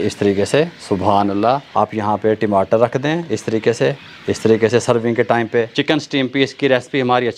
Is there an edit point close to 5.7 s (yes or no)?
yes